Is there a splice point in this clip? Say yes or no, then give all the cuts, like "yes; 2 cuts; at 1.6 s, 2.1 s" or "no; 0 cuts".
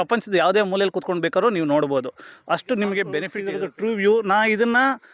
yes; 1 cut; at 3.2 s